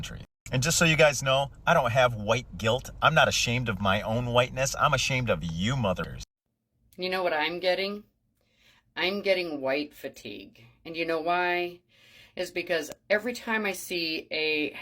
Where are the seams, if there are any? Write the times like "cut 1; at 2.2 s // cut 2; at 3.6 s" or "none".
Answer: cut 1; at 6.1 s